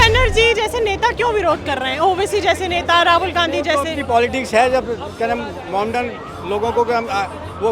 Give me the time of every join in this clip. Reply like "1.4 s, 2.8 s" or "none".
none